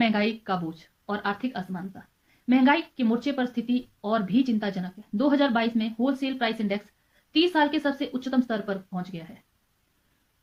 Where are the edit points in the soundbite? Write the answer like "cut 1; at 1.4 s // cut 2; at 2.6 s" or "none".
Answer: none